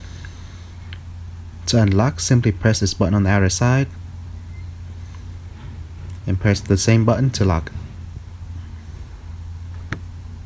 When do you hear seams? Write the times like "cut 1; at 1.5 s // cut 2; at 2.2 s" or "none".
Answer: none